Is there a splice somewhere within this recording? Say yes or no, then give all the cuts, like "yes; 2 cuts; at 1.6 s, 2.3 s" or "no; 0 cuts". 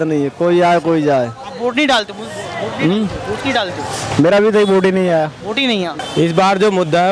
yes; 1 cut; at 6.0 s